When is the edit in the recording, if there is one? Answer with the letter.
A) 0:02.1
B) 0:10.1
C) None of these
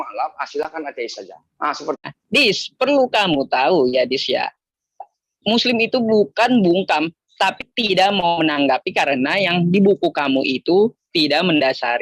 A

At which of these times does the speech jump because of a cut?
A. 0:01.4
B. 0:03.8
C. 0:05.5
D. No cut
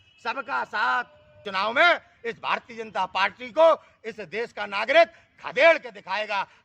A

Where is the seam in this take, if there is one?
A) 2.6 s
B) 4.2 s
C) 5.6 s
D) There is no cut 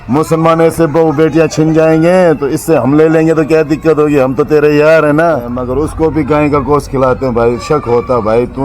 C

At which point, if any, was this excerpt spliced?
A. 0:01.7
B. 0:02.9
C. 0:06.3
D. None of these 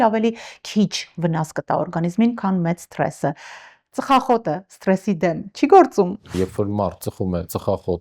C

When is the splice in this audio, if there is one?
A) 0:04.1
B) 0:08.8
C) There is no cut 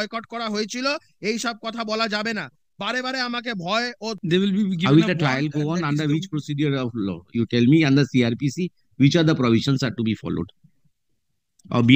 A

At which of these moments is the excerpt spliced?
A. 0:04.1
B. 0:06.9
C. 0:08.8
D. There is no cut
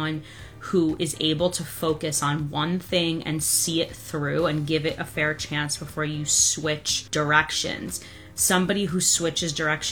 B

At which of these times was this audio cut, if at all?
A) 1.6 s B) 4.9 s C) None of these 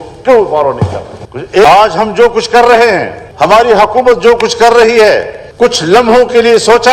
A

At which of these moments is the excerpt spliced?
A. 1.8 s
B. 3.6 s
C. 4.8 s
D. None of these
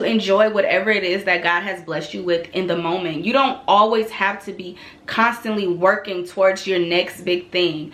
D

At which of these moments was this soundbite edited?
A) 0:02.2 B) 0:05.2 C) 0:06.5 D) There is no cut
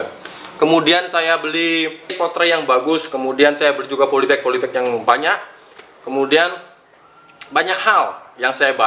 A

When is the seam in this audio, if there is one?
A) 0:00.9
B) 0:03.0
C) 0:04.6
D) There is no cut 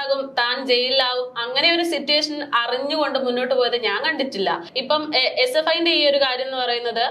C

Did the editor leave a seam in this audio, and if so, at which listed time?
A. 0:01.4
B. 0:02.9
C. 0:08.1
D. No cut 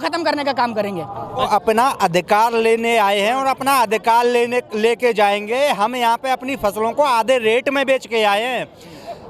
A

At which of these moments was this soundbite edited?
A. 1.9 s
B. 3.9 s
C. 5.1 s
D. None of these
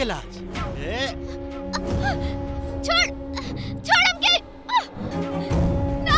C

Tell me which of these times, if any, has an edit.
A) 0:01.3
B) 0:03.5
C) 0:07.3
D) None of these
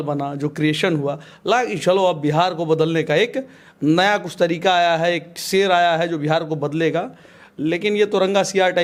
D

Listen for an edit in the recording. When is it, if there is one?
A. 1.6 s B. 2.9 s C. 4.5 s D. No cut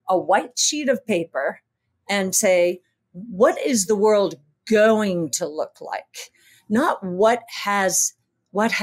D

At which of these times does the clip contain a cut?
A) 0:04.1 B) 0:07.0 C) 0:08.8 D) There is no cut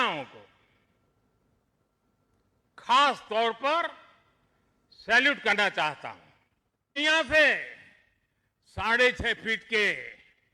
B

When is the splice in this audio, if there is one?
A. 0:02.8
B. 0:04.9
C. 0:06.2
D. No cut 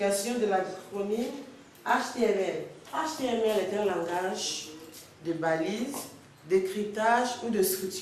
A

